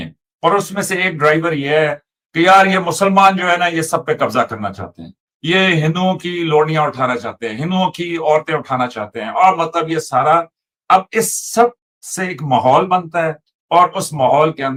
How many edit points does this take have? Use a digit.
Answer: 0